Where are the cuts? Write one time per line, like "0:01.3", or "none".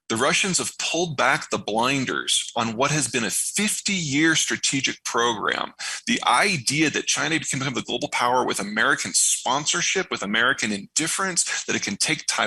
none